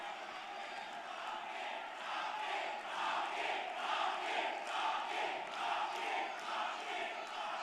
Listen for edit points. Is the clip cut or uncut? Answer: uncut